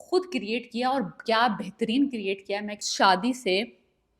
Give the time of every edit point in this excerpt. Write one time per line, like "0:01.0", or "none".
0:02.8